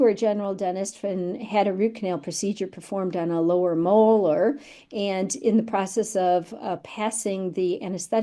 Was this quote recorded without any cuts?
yes; 0 cuts

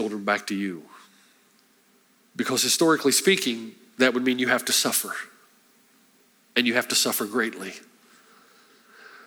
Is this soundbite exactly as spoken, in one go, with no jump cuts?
no; 1 cut; at 2.2 s

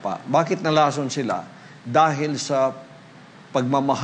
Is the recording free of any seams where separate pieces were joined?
yes; 0 cuts

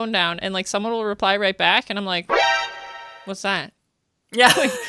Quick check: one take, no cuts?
yes; 0 cuts

